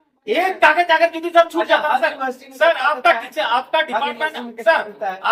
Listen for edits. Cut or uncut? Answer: uncut